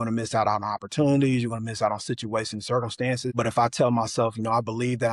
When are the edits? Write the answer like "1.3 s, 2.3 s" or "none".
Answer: 3.3 s